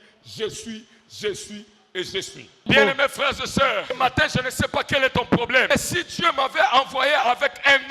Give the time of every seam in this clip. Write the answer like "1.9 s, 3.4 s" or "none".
2.6 s, 3.9 s, 5.7 s